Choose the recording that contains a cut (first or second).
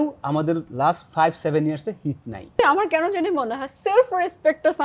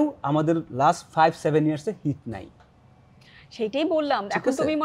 first